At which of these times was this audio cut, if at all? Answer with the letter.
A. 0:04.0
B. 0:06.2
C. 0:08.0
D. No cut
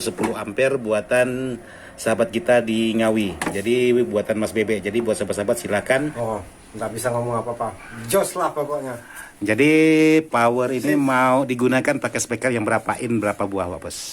B